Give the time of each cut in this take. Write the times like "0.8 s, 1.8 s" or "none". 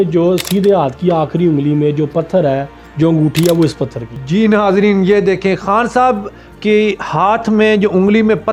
none